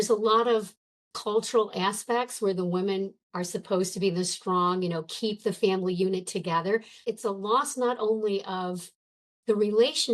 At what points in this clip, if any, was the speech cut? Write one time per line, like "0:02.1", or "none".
0:07.0

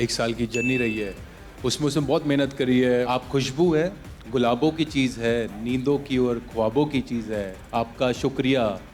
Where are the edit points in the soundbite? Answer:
0:03.0
0:07.6

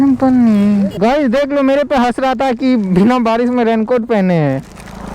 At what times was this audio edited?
0:01.0

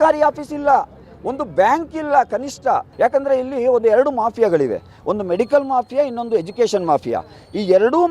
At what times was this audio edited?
0:02.9

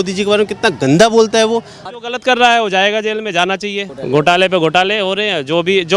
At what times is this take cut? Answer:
0:01.9
0:03.9

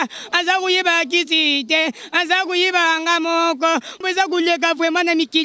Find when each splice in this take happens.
0:04.0

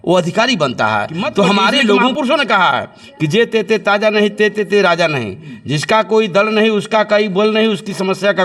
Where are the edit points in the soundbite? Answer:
0:02.1

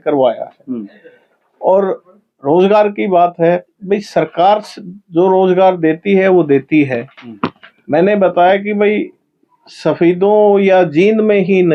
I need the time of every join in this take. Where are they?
none

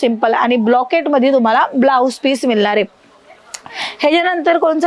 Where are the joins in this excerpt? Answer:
none

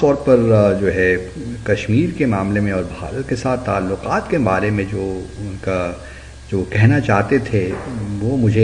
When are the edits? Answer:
none

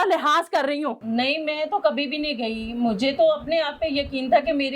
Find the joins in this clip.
0:01.0

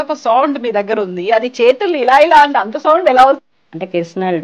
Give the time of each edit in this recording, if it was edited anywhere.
0:03.5

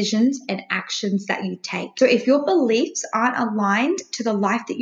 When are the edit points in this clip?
0:01.9

